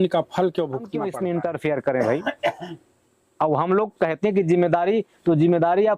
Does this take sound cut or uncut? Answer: cut